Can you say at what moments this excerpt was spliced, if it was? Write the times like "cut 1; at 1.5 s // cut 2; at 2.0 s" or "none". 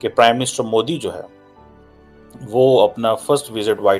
none